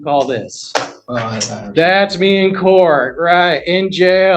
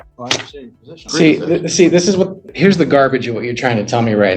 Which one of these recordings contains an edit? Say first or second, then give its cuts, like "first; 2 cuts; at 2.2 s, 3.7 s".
second; 2 cuts; at 1.0 s, 2.4 s